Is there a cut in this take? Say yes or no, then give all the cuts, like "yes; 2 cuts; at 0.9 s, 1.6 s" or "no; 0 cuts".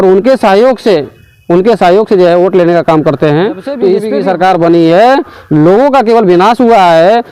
yes; 1 cut; at 4.0 s